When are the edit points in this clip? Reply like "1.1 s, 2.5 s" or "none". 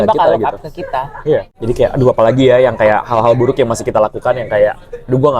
1.5 s